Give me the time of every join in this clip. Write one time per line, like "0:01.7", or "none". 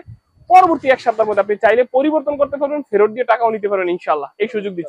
none